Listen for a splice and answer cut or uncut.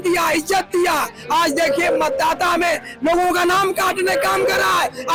uncut